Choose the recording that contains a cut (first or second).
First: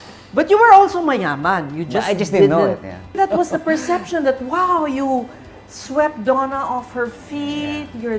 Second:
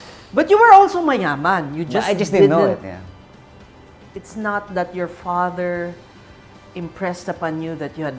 first